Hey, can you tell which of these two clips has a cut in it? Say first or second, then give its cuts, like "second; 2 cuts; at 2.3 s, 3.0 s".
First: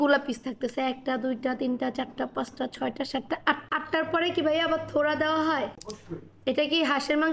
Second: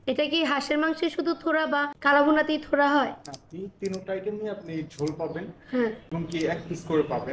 second; 2 cuts; at 1.9 s, 6.0 s